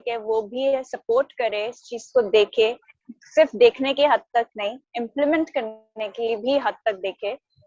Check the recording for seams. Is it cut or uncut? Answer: uncut